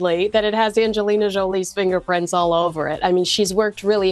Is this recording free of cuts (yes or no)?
yes